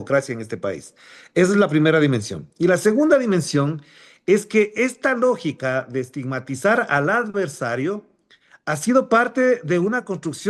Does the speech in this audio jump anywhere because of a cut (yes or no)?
no